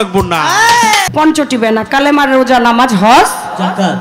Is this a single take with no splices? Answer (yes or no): no